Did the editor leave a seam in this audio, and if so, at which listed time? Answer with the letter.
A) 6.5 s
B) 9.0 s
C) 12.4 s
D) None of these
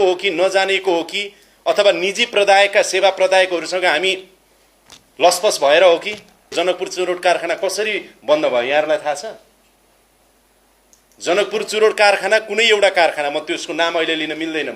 A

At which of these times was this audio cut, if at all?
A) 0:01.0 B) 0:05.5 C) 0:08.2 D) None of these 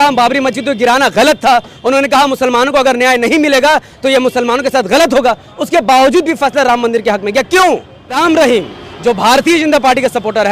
C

